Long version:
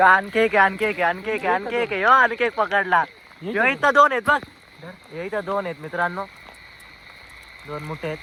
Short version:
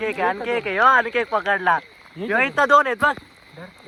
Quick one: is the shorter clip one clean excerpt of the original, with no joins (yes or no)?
yes